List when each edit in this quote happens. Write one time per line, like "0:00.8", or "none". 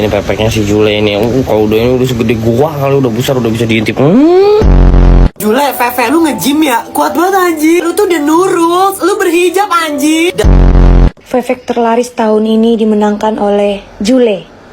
none